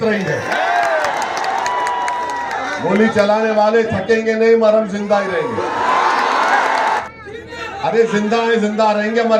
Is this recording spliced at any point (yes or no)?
yes